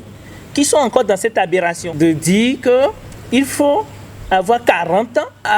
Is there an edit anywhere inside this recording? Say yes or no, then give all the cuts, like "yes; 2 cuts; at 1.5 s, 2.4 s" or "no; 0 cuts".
yes; 1 cut; at 1.8 s